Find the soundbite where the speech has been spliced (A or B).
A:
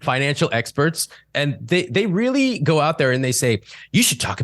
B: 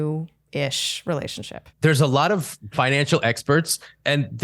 B